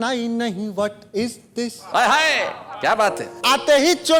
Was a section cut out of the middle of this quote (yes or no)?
no